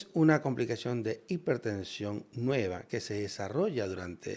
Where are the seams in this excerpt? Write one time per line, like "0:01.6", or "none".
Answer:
none